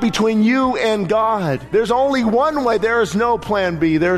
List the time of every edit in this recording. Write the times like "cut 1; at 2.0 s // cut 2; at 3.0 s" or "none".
cut 1; at 1.6 s